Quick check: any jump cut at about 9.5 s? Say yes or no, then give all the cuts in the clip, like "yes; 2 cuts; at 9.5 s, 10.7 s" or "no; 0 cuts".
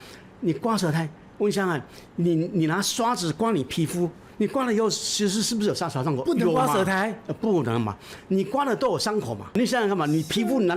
yes; 1 cut; at 9.5 s